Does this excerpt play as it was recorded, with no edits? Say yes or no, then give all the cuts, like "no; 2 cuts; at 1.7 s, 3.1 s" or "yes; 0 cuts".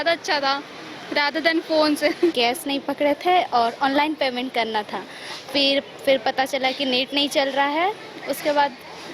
no; 1 cut; at 2.3 s